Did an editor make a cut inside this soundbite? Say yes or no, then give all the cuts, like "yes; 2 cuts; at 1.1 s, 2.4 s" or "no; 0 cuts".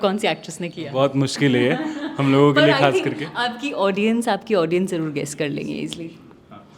no; 0 cuts